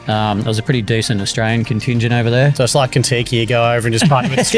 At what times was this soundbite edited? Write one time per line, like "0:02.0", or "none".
none